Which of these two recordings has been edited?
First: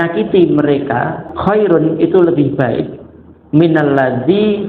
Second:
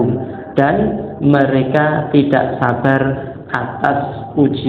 first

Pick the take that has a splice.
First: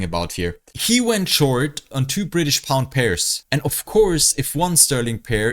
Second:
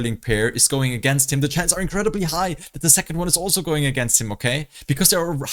first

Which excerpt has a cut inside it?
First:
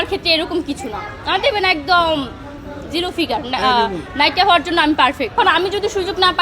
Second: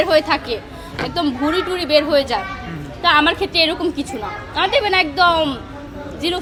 first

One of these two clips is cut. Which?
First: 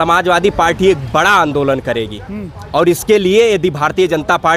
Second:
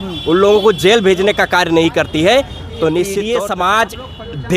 second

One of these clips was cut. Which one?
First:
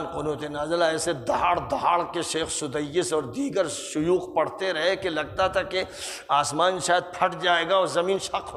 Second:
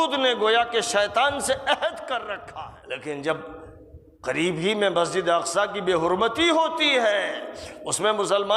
second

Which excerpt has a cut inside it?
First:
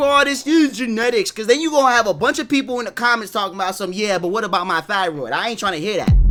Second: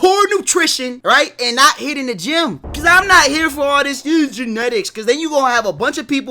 second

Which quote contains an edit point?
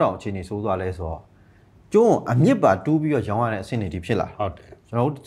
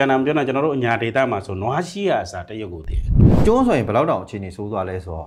second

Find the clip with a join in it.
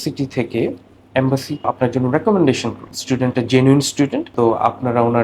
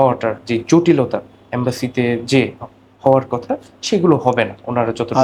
first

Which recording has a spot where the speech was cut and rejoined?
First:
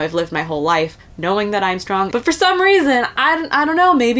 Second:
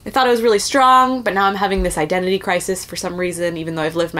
first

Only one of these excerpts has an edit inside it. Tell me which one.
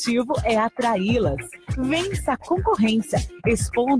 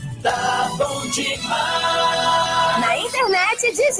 second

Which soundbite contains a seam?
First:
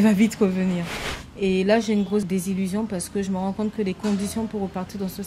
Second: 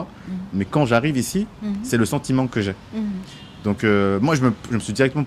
first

